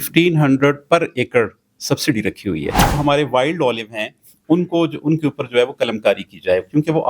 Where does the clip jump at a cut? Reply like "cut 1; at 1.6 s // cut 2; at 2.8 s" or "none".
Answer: cut 1; at 3.0 s